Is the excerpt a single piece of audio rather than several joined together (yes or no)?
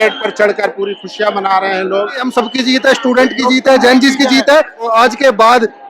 no